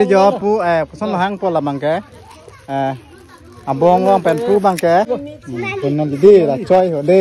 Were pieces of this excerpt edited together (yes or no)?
yes